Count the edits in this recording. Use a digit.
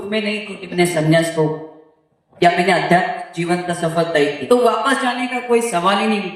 1